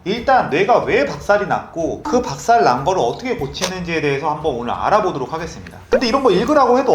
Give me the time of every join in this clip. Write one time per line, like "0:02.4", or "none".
0:05.8